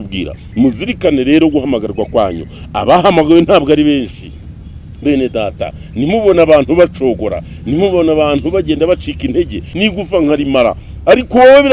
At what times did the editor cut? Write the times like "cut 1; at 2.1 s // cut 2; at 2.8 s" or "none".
cut 1; at 9.7 s

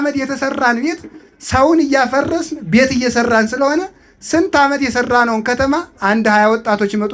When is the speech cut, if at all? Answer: none

